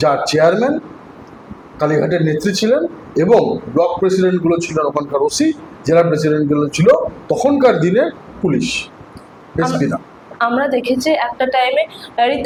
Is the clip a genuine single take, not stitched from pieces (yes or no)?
yes